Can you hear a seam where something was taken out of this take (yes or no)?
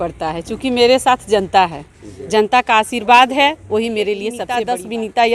yes